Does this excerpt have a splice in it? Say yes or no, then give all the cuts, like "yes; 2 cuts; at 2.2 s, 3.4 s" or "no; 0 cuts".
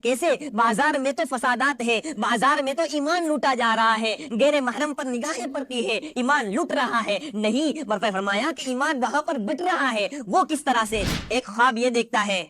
yes; 1 cut; at 11.1 s